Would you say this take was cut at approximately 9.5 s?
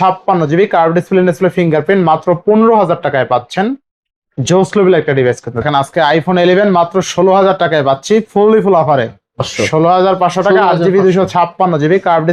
yes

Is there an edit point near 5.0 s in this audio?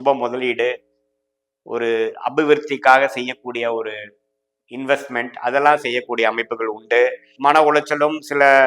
no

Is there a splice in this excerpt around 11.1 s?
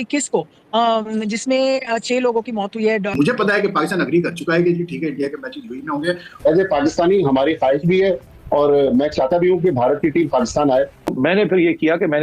yes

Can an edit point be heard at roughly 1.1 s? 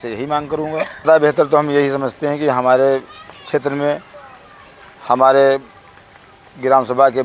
yes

